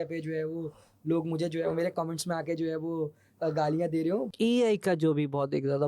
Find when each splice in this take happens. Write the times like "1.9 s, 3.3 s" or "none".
4.3 s